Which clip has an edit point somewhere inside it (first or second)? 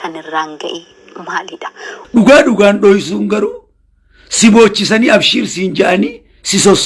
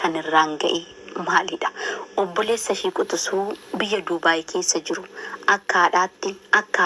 first